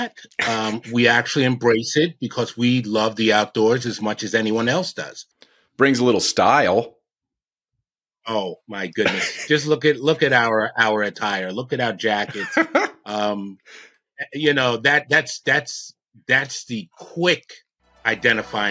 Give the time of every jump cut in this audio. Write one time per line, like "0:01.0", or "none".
0:05.7